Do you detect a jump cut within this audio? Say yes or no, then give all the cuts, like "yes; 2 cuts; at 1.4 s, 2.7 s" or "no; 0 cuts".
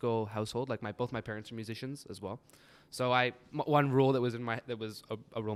no; 0 cuts